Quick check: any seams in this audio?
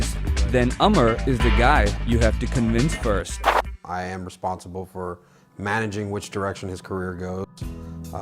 yes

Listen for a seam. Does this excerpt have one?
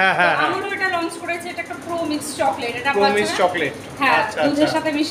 no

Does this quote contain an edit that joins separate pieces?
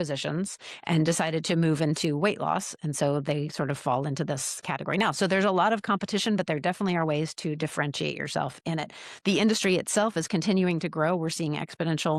no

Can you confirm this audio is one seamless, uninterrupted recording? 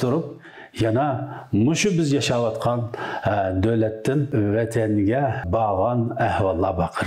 no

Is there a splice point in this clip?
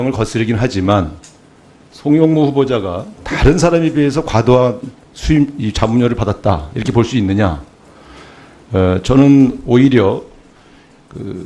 no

